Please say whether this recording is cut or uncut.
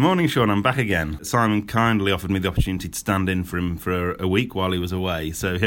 cut